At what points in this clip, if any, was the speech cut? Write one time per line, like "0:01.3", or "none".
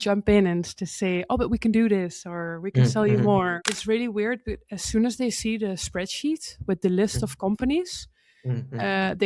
0:03.7